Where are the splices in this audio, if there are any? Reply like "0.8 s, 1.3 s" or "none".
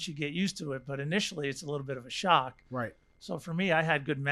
none

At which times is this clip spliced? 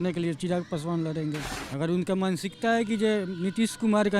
1.6 s

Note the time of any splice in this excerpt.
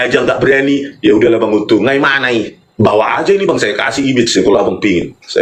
2.6 s

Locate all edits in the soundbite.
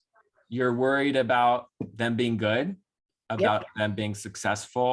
none

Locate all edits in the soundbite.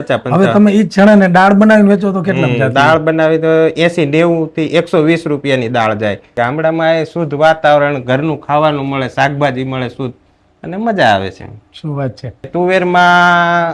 6.3 s, 12.5 s

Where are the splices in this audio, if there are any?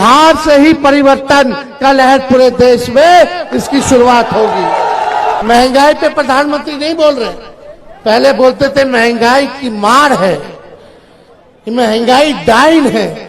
5.4 s

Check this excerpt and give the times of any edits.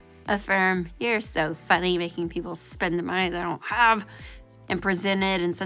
0.9 s, 4.5 s

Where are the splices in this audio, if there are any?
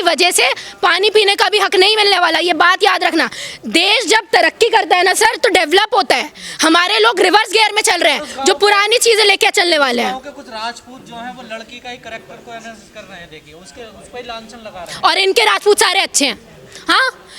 none

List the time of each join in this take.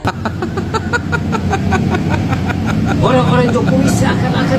none

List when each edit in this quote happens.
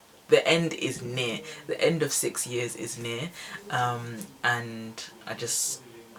none

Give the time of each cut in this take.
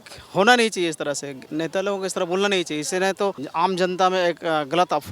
1.4 s, 3.4 s

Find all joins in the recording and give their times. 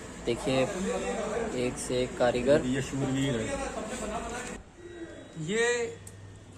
4.5 s

